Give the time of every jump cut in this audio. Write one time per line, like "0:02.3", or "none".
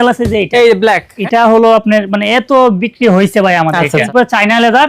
0:01.1
0:04.1